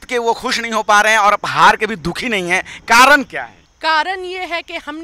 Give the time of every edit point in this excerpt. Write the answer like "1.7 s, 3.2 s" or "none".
3.6 s